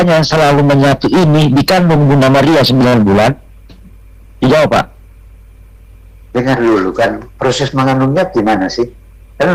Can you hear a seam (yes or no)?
no